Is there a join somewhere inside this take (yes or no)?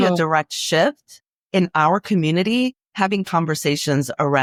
no